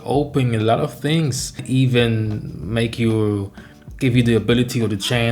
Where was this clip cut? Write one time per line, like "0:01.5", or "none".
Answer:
0:01.6